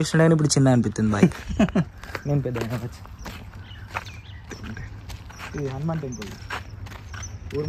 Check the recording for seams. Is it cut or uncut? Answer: uncut